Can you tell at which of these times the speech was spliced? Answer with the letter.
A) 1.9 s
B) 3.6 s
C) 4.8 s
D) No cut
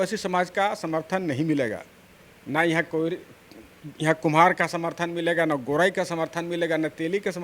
D